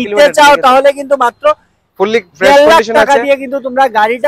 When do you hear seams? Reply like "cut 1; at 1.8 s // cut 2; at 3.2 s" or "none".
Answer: none